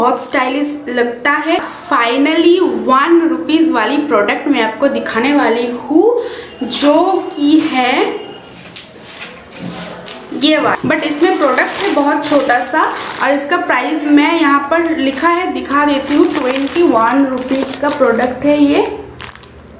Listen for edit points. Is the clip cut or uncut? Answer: cut